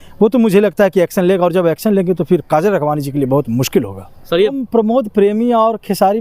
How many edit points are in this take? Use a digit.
1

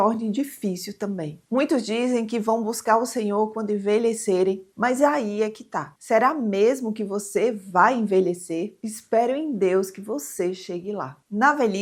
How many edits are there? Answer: 0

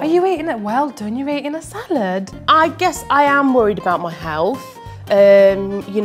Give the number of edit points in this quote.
1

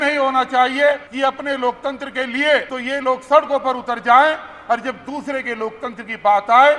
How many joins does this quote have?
2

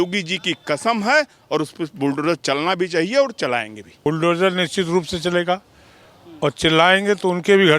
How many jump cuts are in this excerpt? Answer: 1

